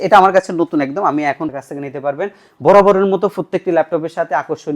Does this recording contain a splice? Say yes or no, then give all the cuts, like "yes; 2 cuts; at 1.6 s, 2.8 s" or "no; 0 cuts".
yes; 1 cut; at 1.5 s